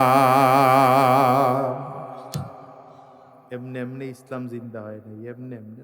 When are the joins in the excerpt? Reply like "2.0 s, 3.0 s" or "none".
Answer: none